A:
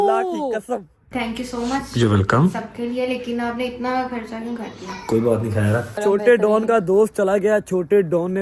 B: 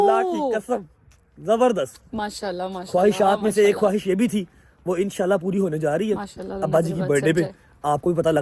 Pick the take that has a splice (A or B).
A